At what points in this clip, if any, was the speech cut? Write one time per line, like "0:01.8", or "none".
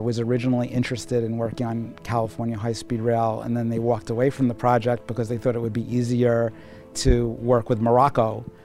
none